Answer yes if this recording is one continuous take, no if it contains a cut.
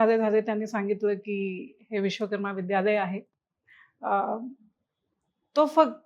yes